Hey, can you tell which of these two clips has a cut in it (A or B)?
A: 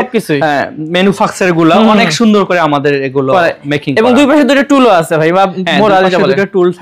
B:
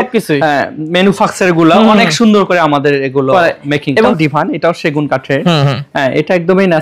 B